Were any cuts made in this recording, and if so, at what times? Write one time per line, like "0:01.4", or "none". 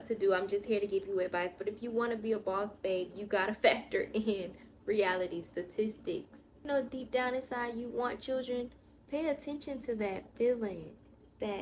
0:06.6